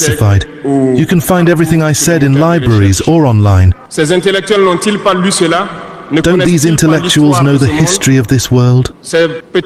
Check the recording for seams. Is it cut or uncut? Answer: uncut